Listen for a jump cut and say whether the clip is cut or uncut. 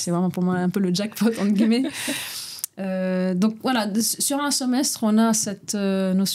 uncut